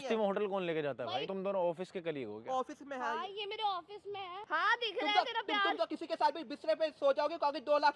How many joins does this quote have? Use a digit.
2